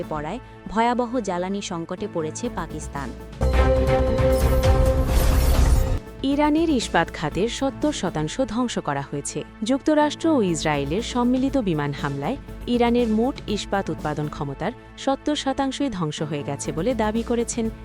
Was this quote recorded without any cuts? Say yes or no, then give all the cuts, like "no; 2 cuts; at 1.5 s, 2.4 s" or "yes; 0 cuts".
no; 2 cuts; at 3.3 s, 9.4 s